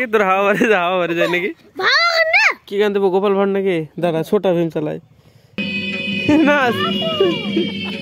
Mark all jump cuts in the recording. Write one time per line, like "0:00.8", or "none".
0:01.7
0:02.6
0:05.6